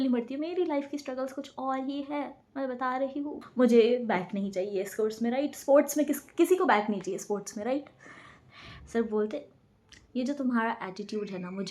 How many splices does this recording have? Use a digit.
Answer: 2